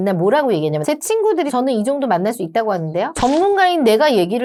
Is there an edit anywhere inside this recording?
no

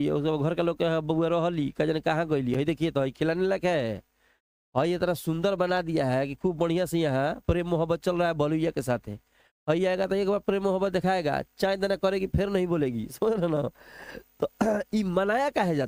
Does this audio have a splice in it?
no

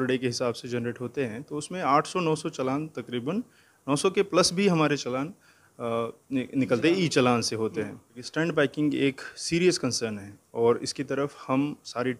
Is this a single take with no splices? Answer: no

